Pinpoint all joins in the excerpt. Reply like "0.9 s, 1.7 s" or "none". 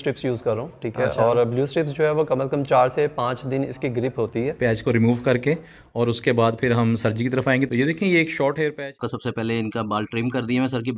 4.6 s, 7.7 s, 8.9 s